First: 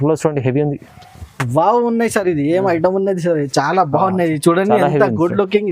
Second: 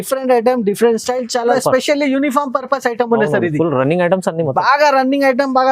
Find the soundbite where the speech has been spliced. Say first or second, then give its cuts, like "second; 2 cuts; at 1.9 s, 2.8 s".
second; 1 cut; at 1.6 s